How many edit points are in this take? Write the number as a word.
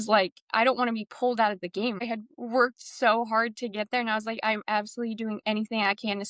one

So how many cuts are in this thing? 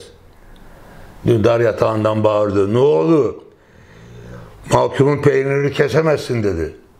zero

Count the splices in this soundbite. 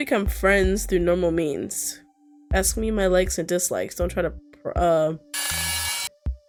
zero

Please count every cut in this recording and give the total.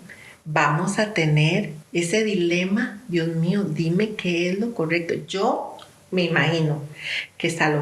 one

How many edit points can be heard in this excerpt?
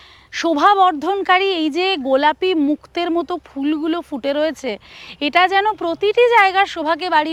zero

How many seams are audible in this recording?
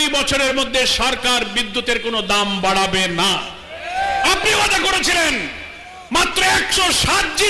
zero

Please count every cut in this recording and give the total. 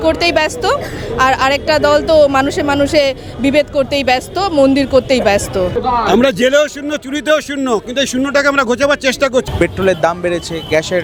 two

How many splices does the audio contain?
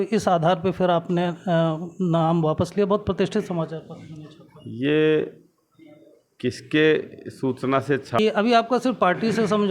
one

